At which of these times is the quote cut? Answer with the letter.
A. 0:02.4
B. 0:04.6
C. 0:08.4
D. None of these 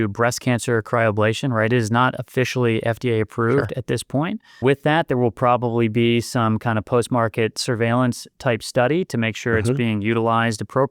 B